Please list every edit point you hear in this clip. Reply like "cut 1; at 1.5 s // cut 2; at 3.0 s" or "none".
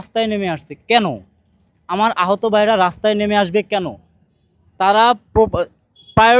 none